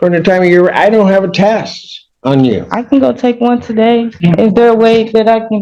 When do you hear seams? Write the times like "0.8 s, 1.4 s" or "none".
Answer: 4.1 s